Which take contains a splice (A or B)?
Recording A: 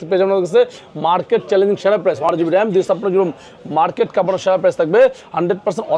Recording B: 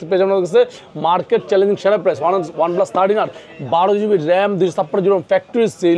A